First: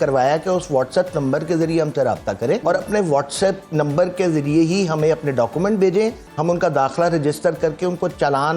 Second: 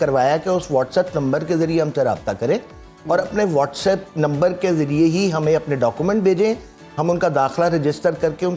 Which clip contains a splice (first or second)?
first